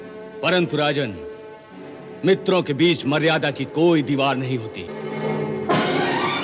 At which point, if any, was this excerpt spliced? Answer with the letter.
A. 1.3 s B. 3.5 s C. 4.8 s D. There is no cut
D